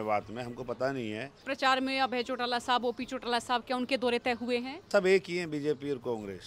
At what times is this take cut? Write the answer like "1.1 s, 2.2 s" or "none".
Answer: 1.4 s, 4.9 s